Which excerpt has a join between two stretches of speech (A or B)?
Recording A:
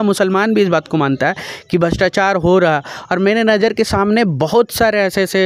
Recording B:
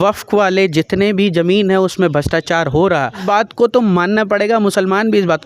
B